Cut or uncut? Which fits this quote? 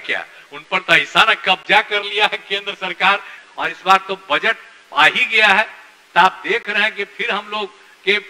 cut